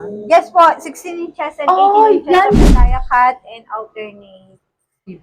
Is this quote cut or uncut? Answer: cut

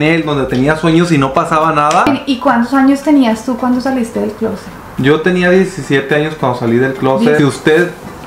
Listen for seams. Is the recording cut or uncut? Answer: cut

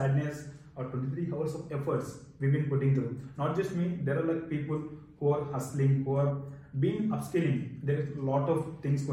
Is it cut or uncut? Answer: uncut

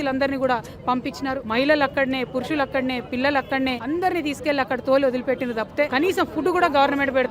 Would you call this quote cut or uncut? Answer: cut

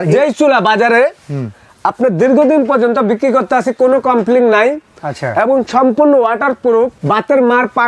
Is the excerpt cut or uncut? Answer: cut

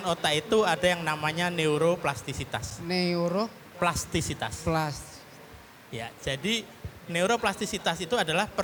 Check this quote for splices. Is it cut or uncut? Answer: uncut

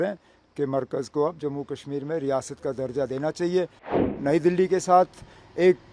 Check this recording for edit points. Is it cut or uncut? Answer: cut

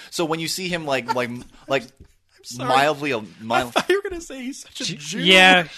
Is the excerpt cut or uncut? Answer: uncut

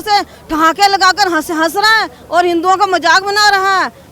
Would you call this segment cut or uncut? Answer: uncut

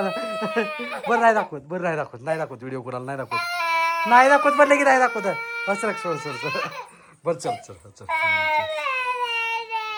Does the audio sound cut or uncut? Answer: uncut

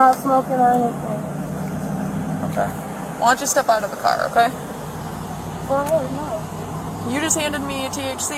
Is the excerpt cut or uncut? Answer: uncut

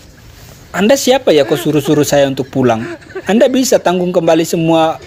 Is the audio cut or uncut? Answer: uncut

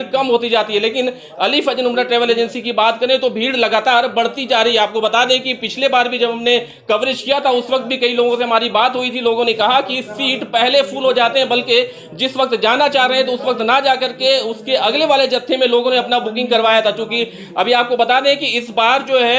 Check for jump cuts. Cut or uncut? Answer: uncut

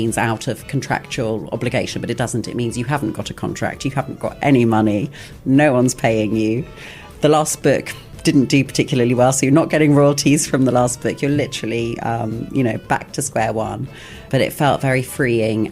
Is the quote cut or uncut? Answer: cut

